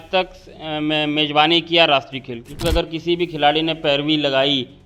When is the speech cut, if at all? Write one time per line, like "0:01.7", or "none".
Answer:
0:02.6